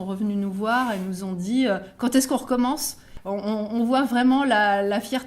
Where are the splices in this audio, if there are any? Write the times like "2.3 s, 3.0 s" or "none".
none